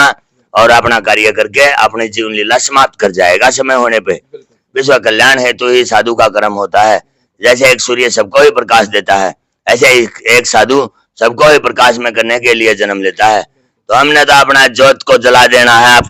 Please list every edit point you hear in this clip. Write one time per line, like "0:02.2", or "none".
0:04.6